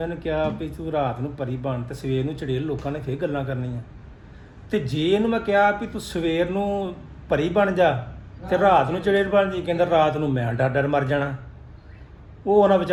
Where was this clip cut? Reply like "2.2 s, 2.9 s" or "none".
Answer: none